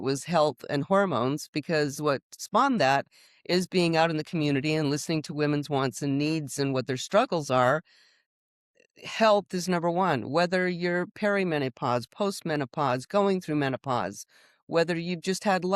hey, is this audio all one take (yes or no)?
no